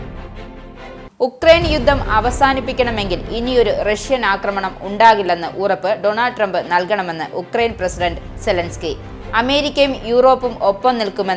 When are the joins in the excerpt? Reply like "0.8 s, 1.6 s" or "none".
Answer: 1.1 s